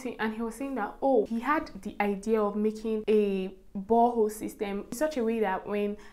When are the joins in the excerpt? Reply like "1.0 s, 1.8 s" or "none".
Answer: 1.3 s, 3.0 s, 5.0 s